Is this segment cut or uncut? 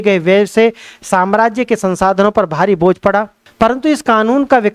cut